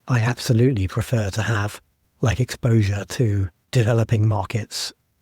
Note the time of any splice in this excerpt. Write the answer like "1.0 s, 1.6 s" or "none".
3.7 s